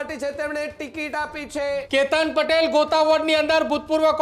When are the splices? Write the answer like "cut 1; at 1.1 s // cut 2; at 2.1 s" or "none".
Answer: cut 1; at 1.8 s